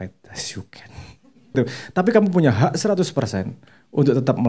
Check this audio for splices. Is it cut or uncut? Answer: cut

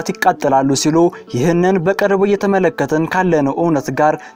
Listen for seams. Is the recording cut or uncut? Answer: uncut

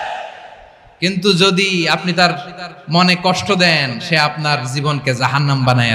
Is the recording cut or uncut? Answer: uncut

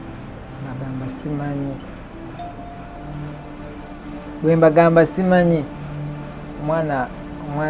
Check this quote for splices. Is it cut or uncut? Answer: uncut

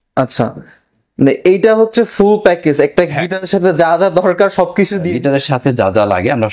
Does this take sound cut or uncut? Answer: cut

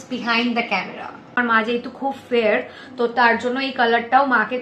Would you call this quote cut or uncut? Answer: cut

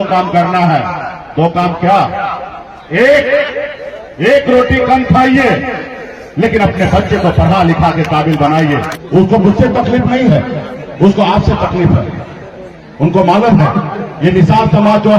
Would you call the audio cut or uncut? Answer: cut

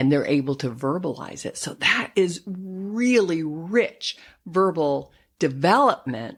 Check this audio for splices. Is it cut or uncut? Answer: uncut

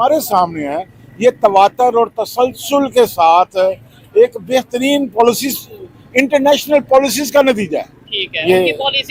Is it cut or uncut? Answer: uncut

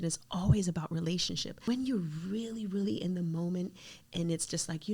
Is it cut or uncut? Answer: cut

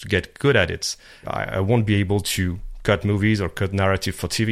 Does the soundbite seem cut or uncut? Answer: cut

